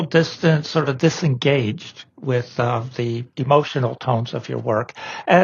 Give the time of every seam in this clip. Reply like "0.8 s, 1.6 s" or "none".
3.3 s